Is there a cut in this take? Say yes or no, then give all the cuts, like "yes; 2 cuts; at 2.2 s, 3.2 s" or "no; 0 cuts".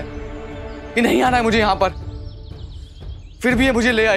no; 0 cuts